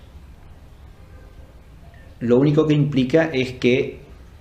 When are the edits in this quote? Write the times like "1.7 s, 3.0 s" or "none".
2.3 s